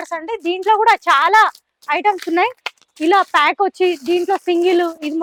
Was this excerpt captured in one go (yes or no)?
yes